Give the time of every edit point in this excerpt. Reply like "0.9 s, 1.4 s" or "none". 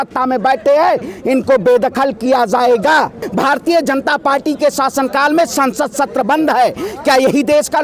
3.2 s